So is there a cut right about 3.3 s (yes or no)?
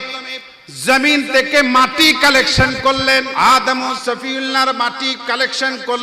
yes